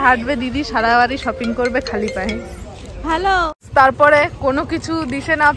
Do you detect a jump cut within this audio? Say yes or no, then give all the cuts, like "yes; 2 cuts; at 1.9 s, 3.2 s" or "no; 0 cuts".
yes; 1 cut; at 3.6 s